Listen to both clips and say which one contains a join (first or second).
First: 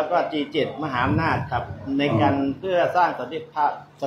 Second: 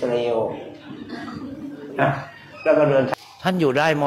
second